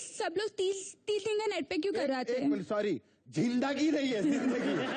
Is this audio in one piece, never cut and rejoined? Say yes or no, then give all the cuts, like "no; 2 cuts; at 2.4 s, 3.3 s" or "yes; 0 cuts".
yes; 0 cuts